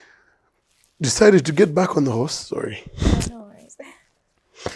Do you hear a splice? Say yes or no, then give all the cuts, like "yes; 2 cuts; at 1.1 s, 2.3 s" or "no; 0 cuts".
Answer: no; 0 cuts